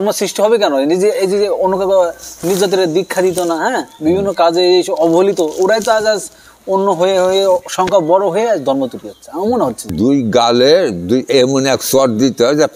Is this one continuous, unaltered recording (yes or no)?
no